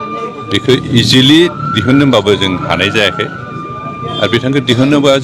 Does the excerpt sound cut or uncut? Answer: uncut